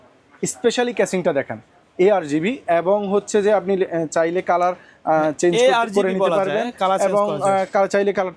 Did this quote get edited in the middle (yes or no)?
no